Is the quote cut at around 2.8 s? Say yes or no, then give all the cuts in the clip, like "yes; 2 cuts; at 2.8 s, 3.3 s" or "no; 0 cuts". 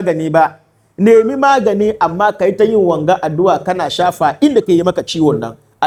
no; 0 cuts